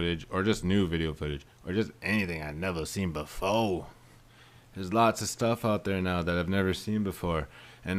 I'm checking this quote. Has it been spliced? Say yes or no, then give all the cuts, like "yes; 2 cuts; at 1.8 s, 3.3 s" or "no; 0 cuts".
no; 0 cuts